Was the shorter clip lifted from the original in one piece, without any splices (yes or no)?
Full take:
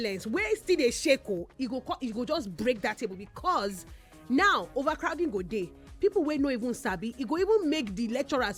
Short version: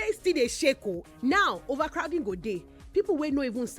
no